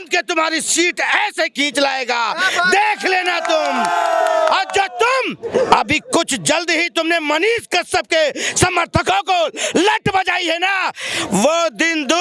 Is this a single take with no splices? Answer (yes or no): yes